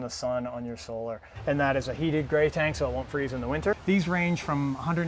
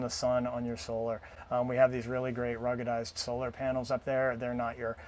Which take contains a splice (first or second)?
first